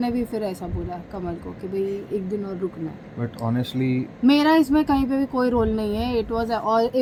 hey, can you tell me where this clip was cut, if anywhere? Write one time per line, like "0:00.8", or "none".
none